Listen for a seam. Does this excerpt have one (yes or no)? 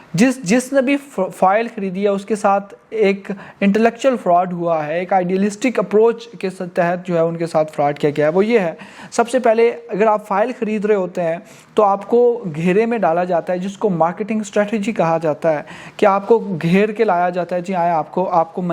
no